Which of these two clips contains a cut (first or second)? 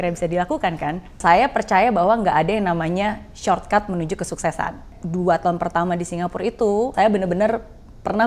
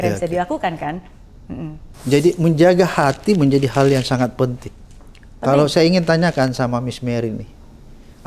first